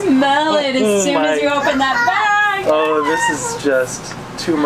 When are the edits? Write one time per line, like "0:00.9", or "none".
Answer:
none